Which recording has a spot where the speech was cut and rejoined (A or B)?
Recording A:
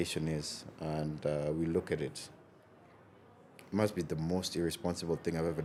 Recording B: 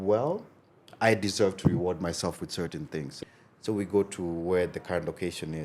B